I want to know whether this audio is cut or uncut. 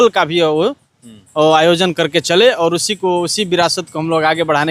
uncut